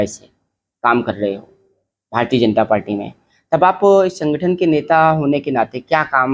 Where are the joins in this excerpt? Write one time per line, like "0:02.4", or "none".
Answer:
none